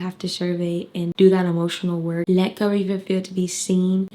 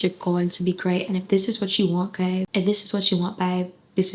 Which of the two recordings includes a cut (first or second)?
first